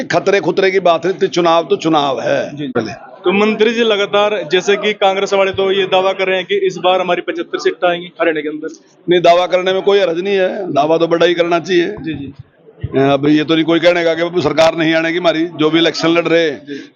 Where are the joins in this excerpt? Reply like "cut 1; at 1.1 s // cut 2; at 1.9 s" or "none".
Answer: cut 1; at 2.7 s